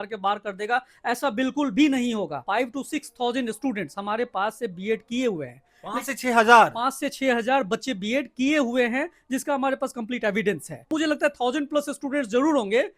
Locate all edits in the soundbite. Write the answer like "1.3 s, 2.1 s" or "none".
2.4 s, 10.9 s